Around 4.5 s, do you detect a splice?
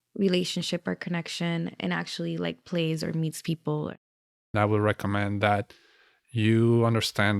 yes; 1 cut; at 4.5 s

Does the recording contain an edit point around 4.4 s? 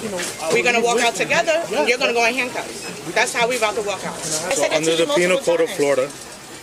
yes; 1 cut; at 4.4 s

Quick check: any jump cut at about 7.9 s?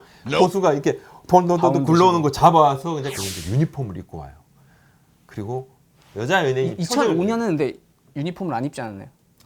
no; 2 cuts; at 3.1 s, 6.0 s

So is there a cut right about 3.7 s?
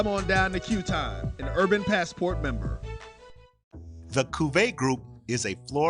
yes; 1 cut; at 3.7 s

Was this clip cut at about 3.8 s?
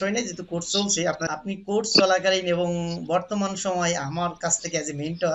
no; 1 cut; at 1.3 s

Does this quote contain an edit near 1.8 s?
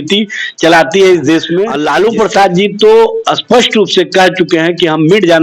yes; 1 cut; at 1.8 s

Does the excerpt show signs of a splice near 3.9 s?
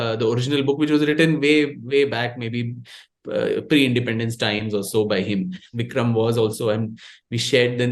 no; 1 cut; at 5.8 s

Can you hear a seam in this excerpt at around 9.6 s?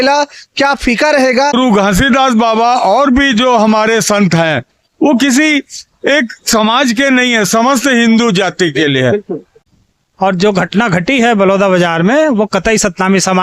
yes; 2 cuts; at 1.5 s, 9.6 s

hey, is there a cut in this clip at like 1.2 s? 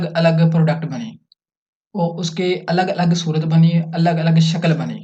no; 0 cuts

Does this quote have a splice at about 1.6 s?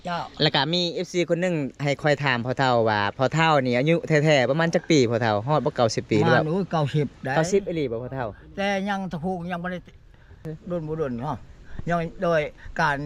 no; 1 cut; at 10.5 s

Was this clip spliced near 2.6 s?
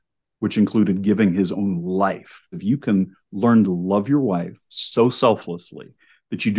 yes; 1 cut; at 2.6 s

